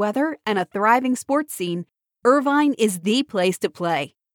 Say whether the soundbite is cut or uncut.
uncut